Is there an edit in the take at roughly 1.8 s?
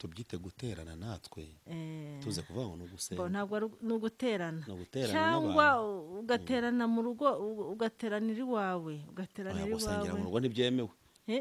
no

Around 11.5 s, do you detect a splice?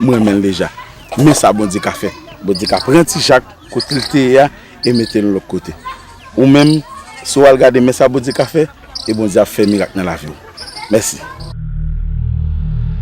yes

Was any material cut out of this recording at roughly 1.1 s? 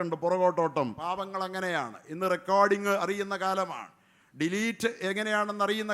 yes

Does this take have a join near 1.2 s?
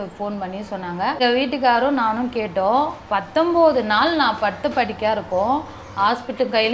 yes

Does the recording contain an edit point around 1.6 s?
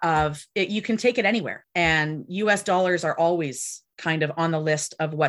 yes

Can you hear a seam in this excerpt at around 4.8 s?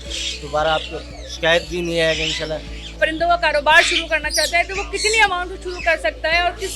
no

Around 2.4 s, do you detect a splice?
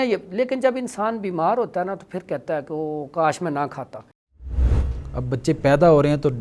no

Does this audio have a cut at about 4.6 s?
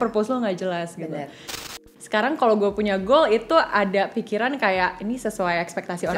no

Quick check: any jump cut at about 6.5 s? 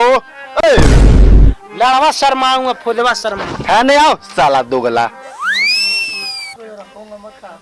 yes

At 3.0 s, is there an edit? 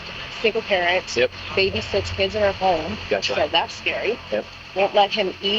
no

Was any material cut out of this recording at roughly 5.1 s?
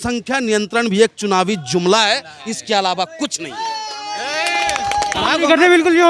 yes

